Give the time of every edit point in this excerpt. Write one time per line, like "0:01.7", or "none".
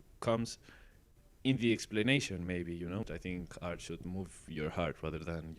0:03.0